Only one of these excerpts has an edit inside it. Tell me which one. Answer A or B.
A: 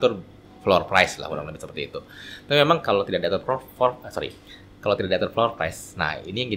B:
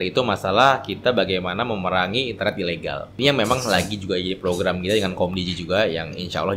B